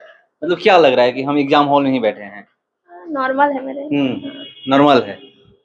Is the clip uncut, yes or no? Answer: yes